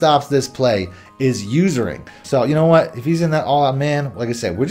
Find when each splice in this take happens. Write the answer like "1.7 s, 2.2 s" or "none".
2.1 s